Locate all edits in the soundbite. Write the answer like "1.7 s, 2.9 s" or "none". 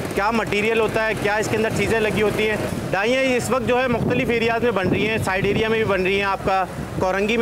none